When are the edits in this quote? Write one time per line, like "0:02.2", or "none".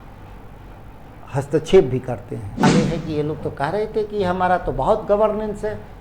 0:02.6